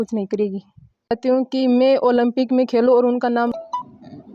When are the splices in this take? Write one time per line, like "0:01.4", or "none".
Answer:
0:01.1
0:03.5